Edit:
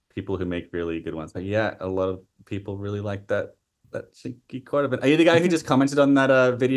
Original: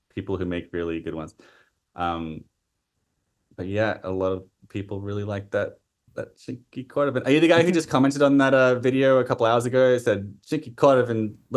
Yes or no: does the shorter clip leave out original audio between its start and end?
yes